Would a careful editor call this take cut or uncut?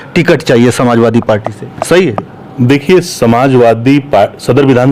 uncut